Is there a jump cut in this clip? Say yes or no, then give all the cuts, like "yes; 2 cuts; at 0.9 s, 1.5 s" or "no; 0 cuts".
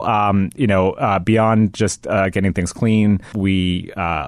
yes; 1 cut; at 3.3 s